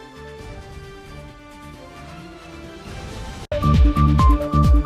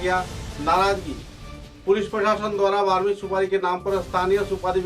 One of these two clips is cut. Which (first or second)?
first